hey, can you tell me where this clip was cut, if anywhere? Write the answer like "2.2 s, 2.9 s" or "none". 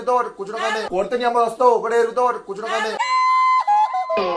none